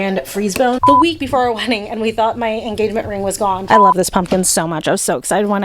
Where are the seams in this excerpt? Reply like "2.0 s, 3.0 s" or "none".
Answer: 0.8 s, 3.7 s